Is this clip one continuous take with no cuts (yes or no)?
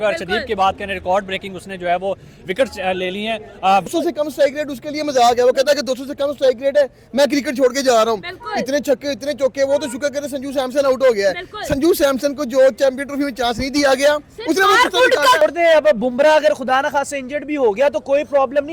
no